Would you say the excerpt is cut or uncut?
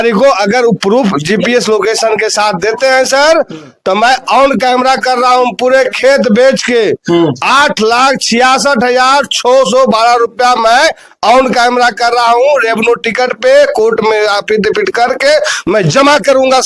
uncut